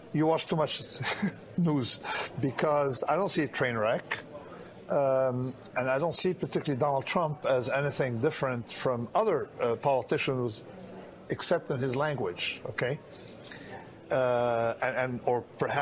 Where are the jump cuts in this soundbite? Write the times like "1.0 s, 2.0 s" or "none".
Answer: 2.7 s